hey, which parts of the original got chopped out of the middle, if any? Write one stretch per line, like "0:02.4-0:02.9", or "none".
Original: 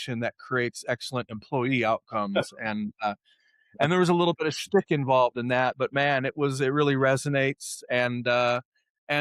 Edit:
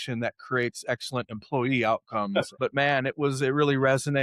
0:02.6-0:05.8